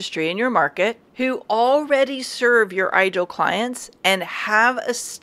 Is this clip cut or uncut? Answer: cut